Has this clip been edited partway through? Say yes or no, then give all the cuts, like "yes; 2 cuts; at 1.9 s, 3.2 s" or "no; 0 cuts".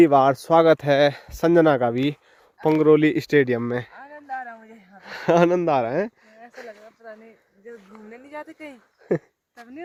no; 0 cuts